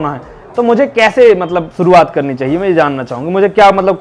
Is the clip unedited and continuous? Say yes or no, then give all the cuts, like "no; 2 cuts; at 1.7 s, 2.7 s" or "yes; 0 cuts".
yes; 0 cuts